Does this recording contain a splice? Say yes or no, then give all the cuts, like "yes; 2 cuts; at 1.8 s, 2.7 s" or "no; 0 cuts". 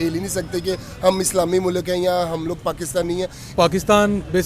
yes; 1 cut; at 3.5 s